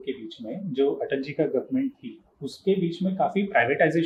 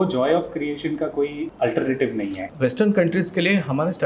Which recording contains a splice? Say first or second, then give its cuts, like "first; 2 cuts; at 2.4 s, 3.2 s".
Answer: second; 2 cuts; at 1.4 s, 2.4 s